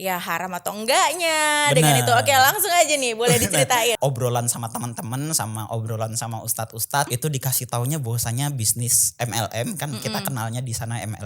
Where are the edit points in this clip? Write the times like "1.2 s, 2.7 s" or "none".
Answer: 4.0 s, 7.1 s

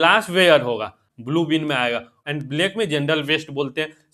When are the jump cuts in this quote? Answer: 1.1 s, 2.1 s

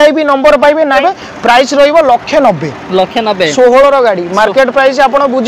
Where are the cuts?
1.0 s

